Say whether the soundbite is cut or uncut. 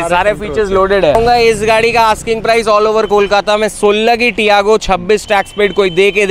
cut